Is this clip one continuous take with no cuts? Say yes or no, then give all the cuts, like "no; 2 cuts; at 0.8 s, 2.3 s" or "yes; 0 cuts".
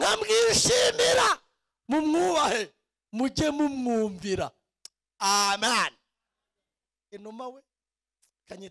yes; 0 cuts